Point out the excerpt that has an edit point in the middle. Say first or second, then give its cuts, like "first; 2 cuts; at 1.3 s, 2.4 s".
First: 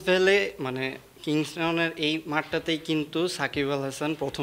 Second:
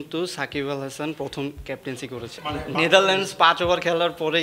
second; 1 cut; at 2.4 s